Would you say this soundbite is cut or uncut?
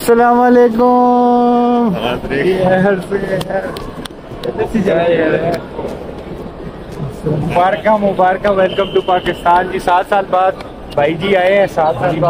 uncut